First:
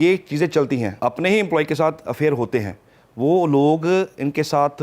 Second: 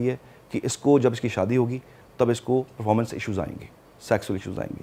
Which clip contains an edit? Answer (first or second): first